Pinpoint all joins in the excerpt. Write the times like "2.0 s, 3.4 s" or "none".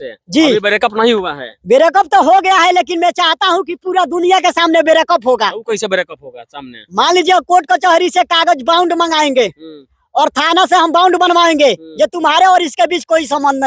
none